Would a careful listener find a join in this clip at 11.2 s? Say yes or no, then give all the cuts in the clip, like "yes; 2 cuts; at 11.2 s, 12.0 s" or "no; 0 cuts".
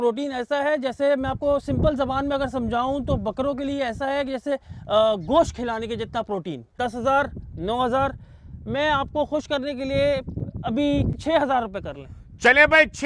yes; 2 cuts; at 6.7 s, 11.2 s